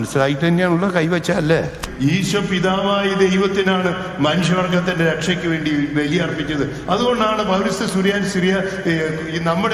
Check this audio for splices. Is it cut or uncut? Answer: cut